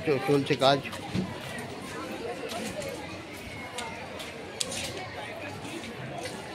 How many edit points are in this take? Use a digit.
0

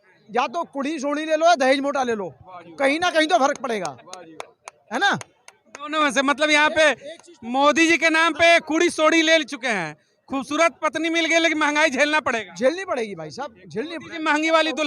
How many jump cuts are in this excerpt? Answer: 0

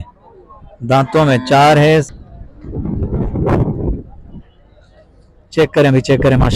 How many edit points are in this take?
1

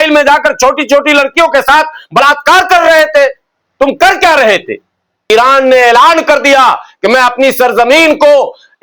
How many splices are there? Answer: 1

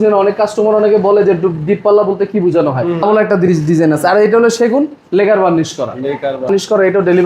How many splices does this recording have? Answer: 2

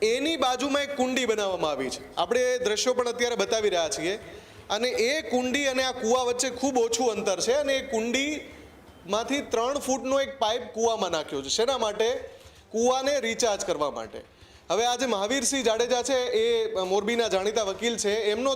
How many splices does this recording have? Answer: 0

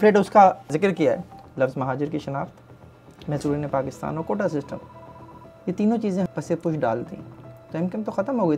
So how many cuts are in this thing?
2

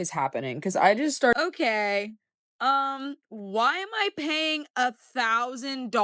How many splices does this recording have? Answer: 1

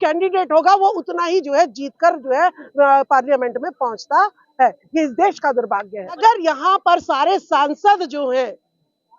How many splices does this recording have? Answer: 1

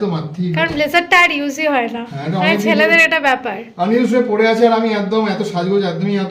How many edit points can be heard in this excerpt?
0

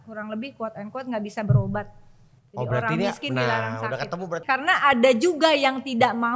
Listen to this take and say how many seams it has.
1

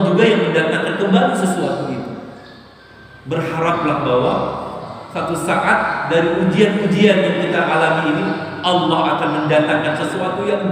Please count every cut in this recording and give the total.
0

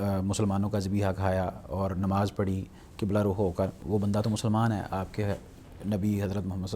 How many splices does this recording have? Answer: 1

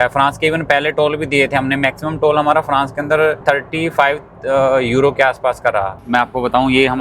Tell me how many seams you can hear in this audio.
2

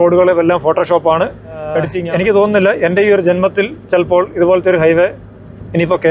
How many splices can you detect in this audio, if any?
1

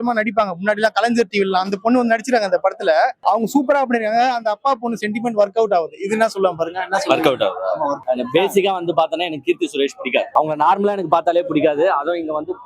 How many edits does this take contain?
3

